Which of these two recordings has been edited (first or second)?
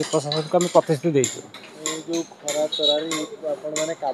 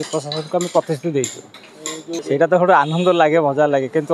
second